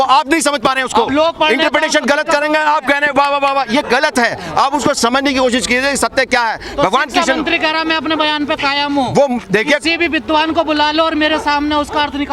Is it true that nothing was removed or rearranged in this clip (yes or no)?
yes